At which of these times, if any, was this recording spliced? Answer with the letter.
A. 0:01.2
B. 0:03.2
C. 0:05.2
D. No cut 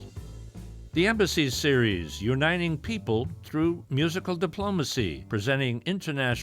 C